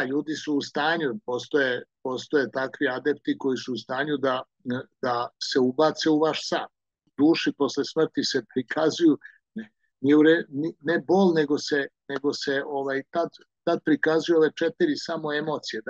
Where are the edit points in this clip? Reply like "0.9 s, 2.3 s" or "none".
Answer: 7.0 s